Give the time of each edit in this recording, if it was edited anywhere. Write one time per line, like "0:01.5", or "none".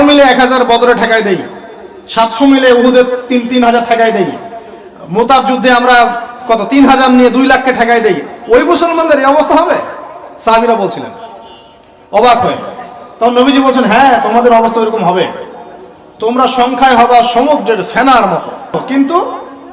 0:18.7